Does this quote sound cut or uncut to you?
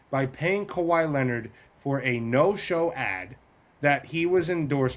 uncut